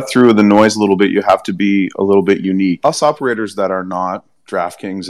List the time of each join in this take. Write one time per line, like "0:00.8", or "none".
0:02.8

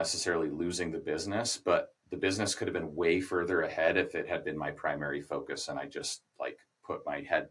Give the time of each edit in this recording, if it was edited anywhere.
none

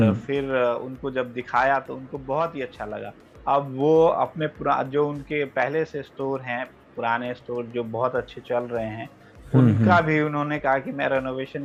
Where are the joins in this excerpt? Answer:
none

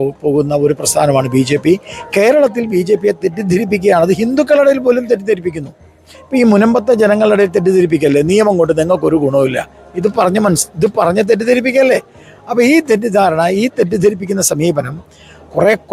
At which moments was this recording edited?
none

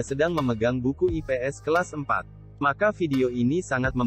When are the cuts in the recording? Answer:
none

